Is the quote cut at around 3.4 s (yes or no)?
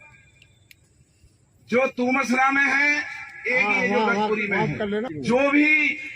no